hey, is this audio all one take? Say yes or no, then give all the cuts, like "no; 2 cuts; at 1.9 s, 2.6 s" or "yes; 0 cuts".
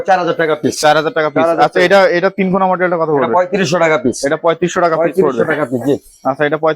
yes; 0 cuts